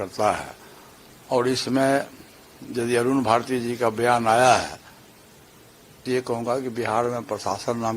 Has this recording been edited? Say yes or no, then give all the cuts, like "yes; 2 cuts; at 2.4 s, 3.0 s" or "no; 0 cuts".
yes; 1 cut; at 6.0 s